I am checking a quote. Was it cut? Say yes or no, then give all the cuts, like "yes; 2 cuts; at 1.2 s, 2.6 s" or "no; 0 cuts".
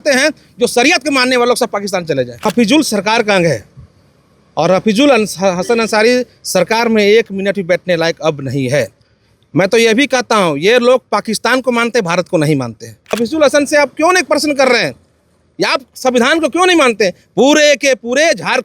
yes; 2 cuts; at 2.4 s, 13.1 s